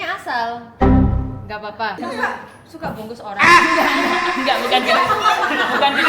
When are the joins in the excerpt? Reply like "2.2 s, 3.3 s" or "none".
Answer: 2.0 s